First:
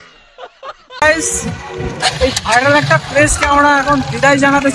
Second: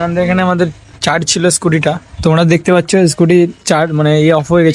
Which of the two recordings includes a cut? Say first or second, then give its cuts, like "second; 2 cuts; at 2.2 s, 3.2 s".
first; 1 cut; at 1.0 s